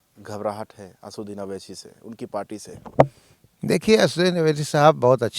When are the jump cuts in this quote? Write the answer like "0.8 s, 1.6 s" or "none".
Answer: none